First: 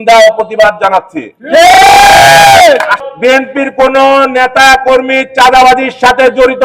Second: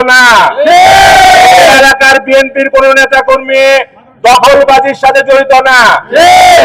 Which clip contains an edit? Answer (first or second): first